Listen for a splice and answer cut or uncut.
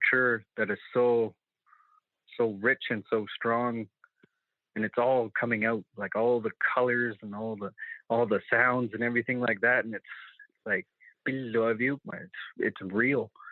uncut